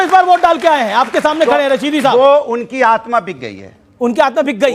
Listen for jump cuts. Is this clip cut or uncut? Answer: uncut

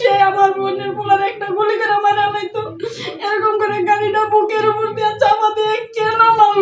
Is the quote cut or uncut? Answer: uncut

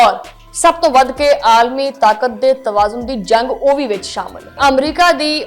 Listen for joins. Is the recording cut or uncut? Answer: cut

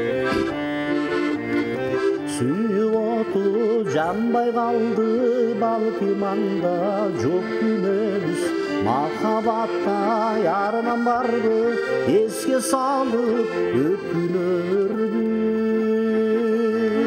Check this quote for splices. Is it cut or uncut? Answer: uncut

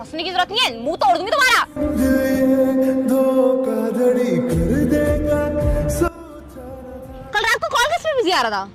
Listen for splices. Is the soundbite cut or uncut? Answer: uncut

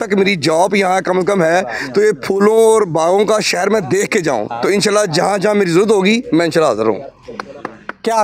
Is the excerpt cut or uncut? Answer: uncut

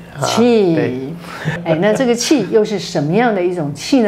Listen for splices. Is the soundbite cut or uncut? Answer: cut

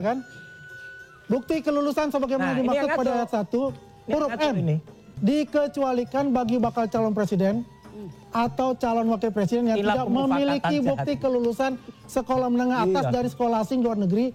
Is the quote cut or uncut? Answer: uncut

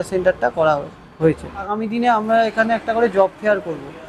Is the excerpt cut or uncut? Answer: cut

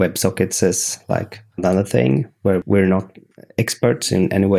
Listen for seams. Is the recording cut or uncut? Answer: uncut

